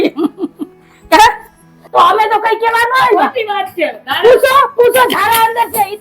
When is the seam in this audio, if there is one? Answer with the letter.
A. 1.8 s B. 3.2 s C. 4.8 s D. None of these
A